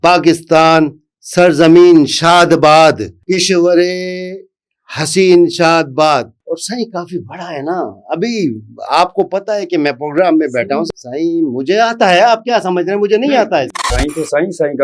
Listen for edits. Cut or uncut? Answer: cut